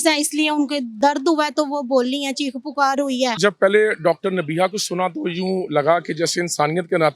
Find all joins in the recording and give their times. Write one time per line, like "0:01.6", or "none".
0:00.9
0:03.4